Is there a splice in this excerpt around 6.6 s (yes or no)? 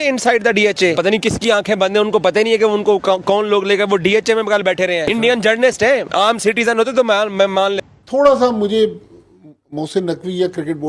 no